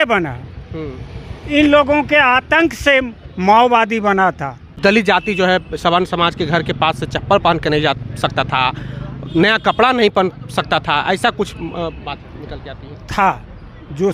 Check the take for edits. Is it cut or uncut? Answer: cut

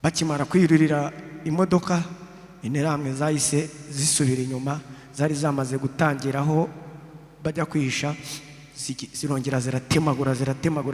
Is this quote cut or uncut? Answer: uncut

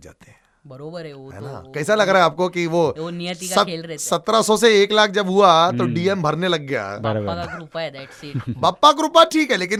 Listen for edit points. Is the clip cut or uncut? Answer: uncut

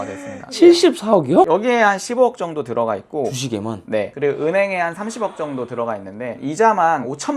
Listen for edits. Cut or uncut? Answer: cut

